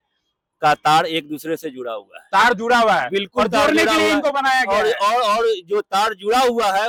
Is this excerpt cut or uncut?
uncut